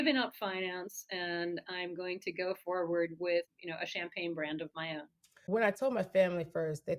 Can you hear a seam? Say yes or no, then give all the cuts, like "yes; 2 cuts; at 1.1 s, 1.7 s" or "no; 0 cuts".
yes; 2 cuts; at 3.5 s, 5.3 s